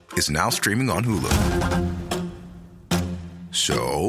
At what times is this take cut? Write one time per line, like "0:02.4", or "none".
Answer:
none